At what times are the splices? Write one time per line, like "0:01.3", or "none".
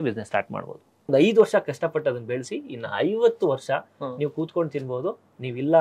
0:01.0